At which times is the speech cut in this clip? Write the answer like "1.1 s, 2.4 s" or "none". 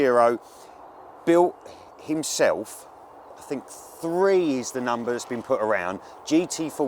none